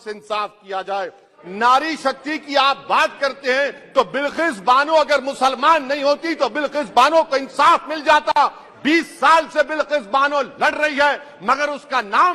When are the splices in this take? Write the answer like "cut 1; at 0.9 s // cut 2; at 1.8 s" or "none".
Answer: cut 1; at 1.4 s

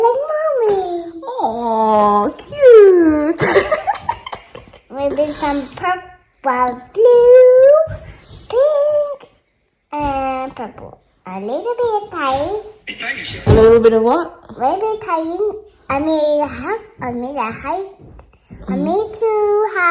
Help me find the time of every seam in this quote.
none

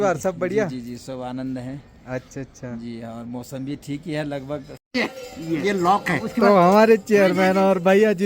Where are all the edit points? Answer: cut 1; at 4.7 s

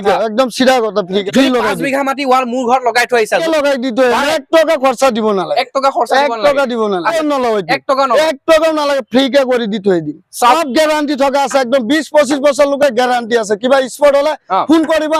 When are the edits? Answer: cut 1; at 1.2 s // cut 2; at 3.4 s // cut 3; at 7.1 s // cut 4; at 10.6 s

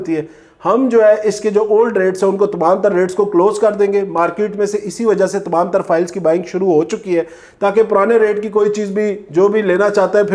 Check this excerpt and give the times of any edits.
none

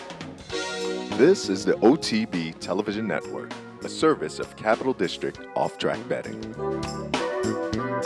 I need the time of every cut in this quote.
none

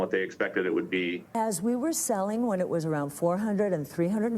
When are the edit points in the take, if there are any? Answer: cut 1; at 1.4 s

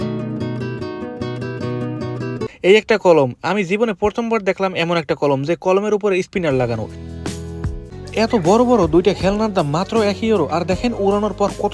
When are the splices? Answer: cut 1; at 2.5 s // cut 2; at 7.9 s

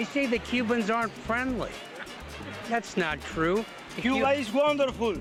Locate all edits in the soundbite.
none

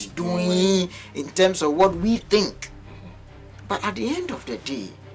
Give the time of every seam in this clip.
none

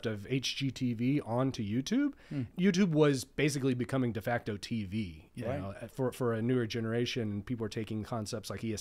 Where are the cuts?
cut 1; at 2.5 s

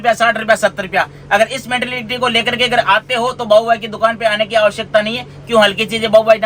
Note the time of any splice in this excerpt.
none

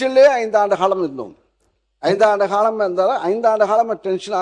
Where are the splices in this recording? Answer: none

